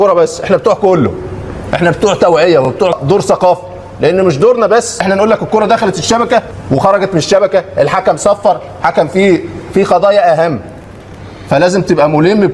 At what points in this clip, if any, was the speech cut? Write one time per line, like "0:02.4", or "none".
0:02.9
0:05.0
0:06.6

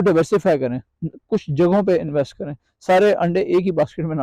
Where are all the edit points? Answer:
none

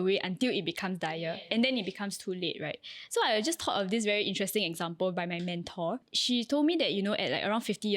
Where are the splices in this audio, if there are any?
0:06.1

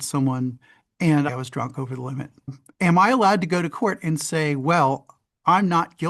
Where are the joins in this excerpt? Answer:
0:01.3
0:02.6

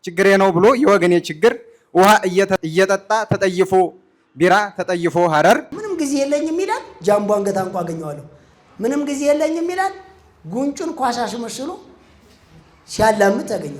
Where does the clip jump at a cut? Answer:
0:02.6
0:05.8

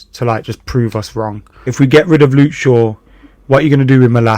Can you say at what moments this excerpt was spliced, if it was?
0:01.7

